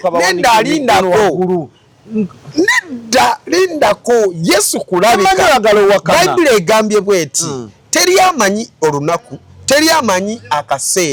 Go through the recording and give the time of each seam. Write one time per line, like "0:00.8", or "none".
none